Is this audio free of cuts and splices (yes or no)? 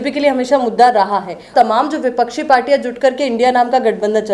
no